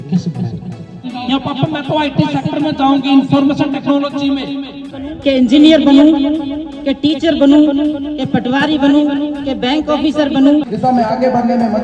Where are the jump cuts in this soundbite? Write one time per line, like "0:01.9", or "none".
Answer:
0:01.0
0:05.2
0:10.7